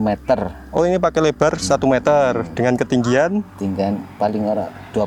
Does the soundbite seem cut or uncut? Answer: uncut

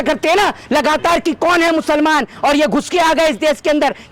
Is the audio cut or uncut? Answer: uncut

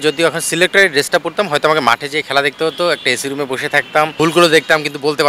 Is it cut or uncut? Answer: cut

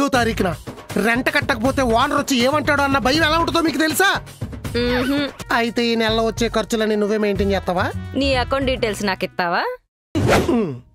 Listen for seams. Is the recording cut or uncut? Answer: cut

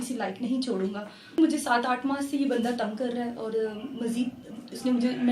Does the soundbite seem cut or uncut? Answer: cut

